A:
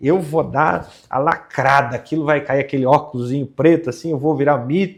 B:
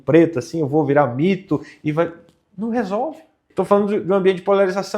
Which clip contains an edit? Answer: B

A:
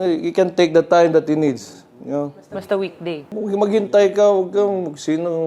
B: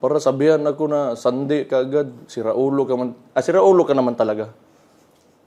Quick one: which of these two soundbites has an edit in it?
A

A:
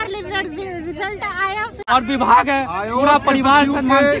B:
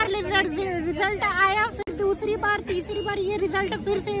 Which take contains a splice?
A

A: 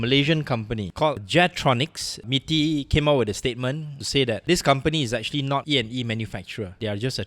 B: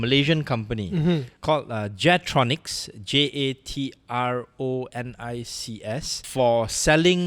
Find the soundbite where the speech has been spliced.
A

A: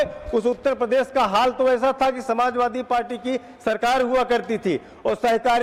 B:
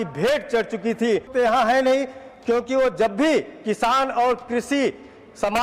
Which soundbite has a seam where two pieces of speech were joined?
B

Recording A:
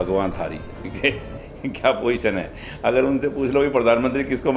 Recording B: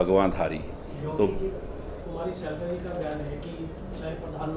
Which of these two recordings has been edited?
A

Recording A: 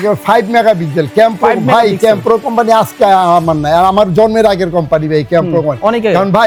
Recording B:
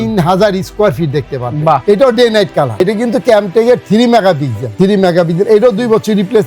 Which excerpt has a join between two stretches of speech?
B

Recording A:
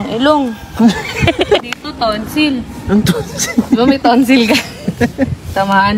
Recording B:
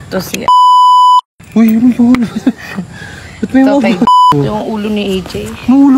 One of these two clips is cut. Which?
B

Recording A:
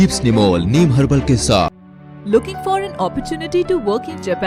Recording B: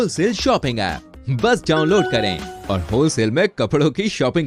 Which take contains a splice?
A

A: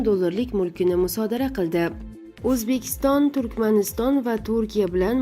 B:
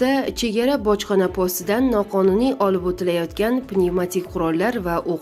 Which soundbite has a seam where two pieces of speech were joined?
A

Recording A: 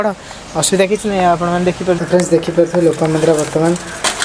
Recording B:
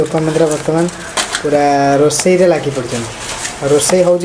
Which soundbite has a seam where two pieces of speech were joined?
A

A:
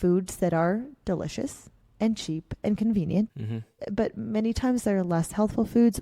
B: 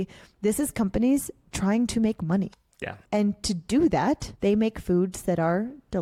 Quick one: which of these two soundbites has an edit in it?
A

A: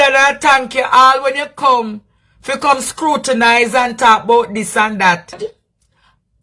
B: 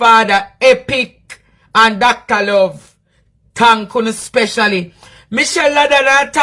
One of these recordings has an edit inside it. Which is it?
A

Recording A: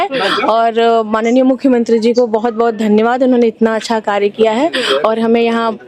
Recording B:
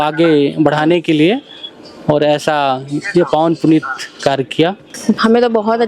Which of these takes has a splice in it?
B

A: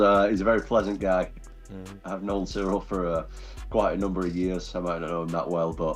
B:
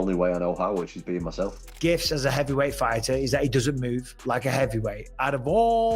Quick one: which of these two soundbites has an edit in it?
B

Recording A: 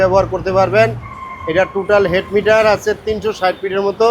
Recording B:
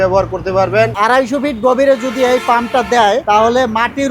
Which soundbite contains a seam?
B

